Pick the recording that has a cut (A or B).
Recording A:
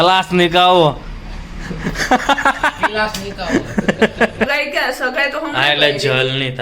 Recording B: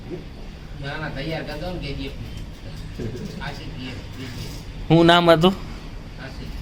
A